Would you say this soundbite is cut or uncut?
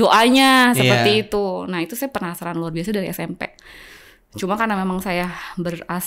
uncut